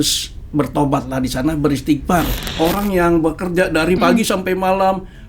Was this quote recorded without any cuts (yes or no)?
no